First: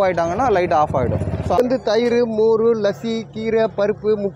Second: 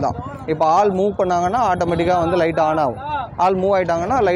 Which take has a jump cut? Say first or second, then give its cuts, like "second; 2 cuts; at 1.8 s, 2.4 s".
first; 1 cut; at 1.6 s